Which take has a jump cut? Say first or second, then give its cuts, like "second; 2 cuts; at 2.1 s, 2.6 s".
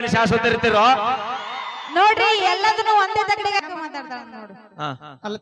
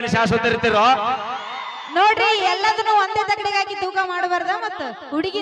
first; 1 cut; at 3.6 s